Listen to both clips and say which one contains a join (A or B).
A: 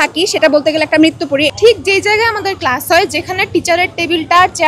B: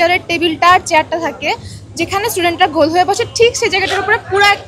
A